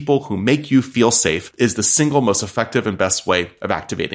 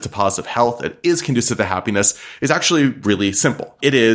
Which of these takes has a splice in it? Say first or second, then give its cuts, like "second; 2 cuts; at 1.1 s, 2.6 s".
first; 1 cut; at 1.5 s